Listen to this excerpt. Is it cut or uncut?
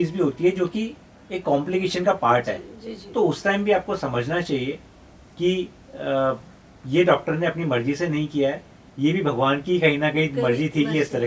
uncut